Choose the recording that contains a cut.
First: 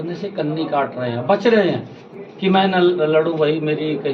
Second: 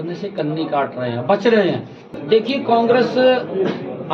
second; 1 cut; at 2.1 s

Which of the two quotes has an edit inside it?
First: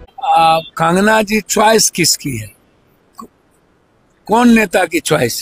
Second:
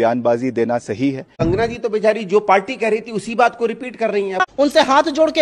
second; 2 cuts; at 1.4 s, 4.4 s

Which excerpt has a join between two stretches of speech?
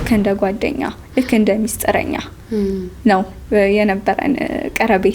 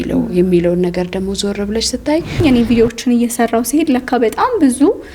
second; 1 cut; at 2.4 s

